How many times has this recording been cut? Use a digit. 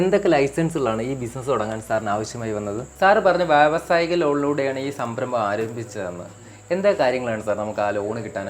1